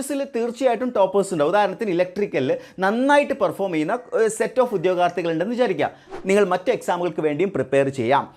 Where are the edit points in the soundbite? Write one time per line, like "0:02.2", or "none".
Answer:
0:06.2